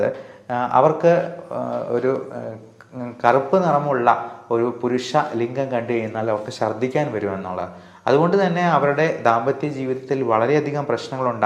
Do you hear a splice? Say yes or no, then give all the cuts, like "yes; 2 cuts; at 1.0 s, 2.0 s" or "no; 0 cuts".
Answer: no; 0 cuts